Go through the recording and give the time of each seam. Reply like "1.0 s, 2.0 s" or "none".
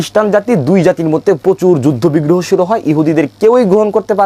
none